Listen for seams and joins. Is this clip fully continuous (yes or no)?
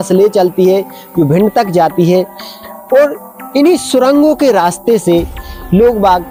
yes